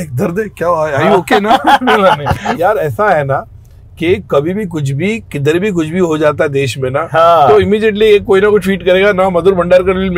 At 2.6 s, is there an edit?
yes; 1 cut; at 2.6 s

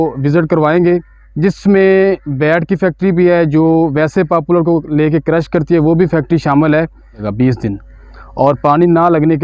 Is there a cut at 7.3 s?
yes; 1 cut; at 7.3 s

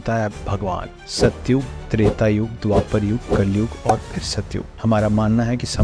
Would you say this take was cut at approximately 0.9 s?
yes; 1 cut; at 0.9 s

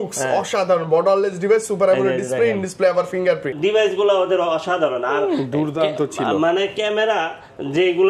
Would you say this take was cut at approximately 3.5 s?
yes; 1 cut; at 3.5 s

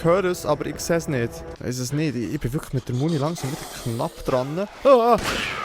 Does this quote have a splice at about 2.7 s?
no; 1 cut; at 1.5 s

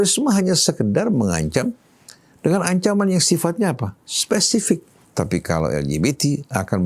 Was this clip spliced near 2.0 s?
no; 1 cut; at 5.0 s

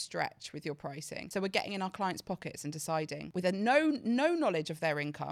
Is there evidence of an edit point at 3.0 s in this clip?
no; 1 cut; at 1.1 s

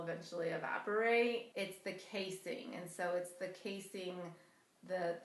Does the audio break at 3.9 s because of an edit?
no; 1 cut; at 1.5 s

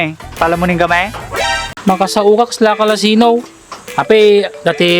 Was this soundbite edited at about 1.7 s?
yes; 1 cut; at 1.7 s

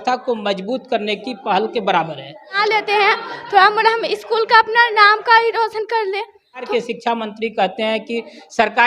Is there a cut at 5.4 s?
no; 2 cuts; at 2.5 s, 6.7 s

